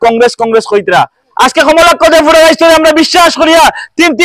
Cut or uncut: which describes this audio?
cut